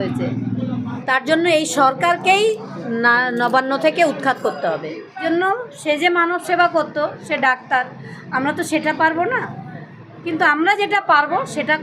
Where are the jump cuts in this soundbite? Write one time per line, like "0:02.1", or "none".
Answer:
0:00.9
0:05.1